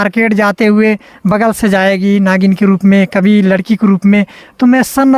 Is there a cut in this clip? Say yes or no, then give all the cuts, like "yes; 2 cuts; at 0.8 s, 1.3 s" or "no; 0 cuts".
no; 0 cuts